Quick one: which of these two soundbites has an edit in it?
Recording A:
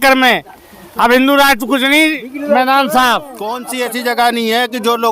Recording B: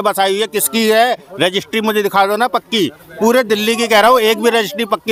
A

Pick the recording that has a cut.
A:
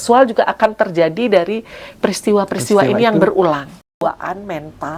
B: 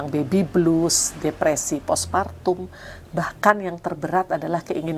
A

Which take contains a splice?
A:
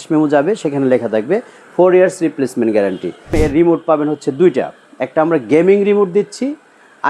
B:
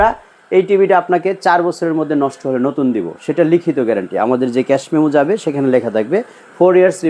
A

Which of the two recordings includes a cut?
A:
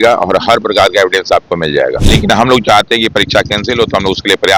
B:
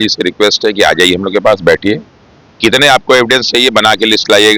A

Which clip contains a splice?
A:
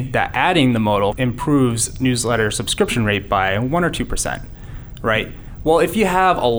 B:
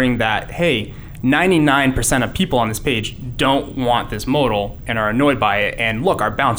A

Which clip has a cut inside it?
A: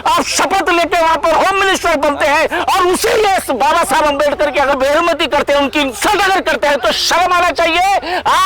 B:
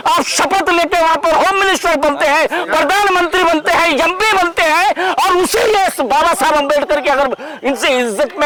A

